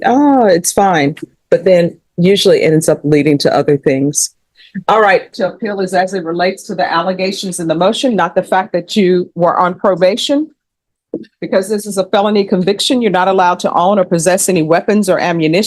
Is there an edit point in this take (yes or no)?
yes